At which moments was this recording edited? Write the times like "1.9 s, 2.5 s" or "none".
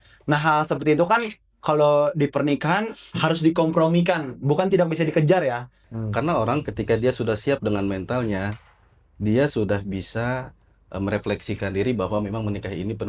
5.8 s

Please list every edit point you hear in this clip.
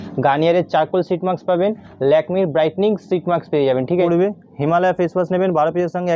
4.0 s

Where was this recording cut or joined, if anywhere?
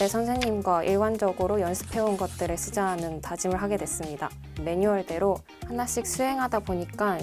4.6 s, 5.6 s

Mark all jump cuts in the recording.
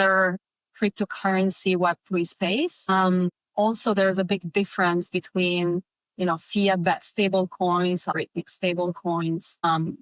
none

